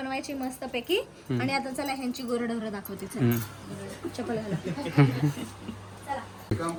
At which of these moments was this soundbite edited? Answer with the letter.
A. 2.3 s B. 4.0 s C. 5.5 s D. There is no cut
D